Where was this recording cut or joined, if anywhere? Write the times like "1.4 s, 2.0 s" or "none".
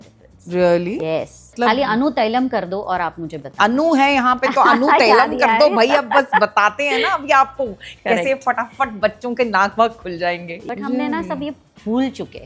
1.5 s, 10.5 s

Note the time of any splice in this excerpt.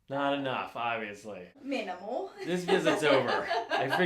1.6 s

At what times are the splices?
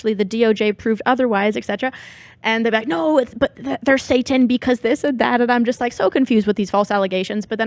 none

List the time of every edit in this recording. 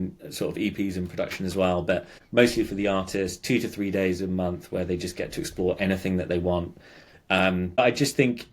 2.2 s, 7.8 s

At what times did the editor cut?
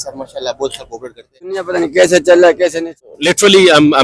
1.7 s, 3.0 s

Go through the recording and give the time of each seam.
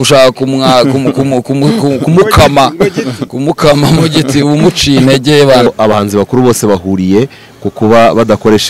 5.7 s

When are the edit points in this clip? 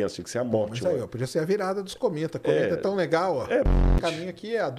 3.7 s

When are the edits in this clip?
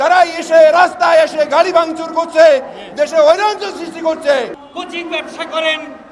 4.6 s

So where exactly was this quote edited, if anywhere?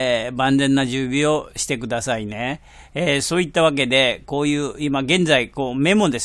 none

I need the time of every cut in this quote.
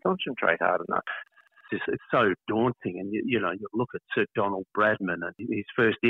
1.4 s, 5.4 s

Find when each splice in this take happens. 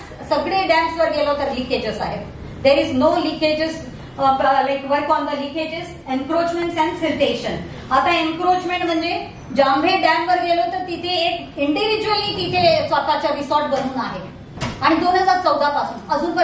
none

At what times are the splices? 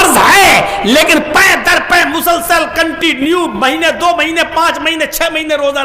none

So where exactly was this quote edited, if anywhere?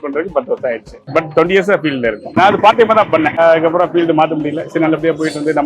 2.3 s, 3.3 s

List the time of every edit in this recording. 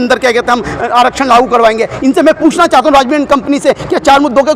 none

